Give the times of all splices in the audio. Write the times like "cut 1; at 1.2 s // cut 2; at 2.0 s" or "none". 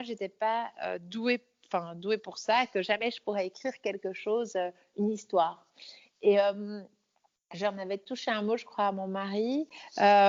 none